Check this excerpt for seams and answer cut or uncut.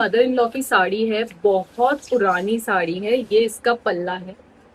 uncut